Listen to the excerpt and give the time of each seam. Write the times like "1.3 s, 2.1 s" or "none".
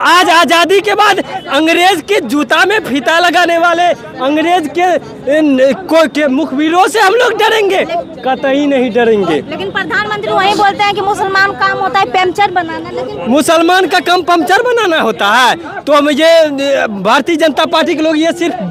none